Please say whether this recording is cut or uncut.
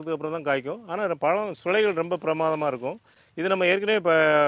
uncut